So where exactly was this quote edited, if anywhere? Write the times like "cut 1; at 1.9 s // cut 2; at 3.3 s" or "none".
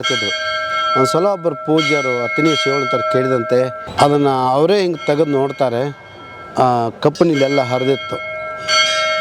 cut 1; at 3.8 s